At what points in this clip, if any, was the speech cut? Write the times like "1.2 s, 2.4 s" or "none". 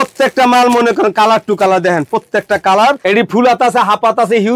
3.0 s